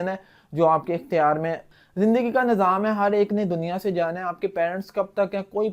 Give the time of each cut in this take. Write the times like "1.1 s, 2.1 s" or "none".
1.8 s